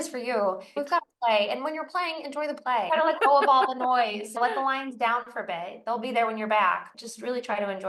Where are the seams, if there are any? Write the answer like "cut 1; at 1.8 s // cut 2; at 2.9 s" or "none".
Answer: cut 1; at 0.7 s // cut 2; at 2.9 s // cut 3; at 4.4 s // cut 4; at 6.9 s